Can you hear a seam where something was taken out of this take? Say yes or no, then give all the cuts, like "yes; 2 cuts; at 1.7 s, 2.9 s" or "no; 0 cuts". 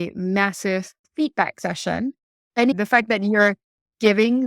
yes; 2 cuts; at 1.0 s, 2.7 s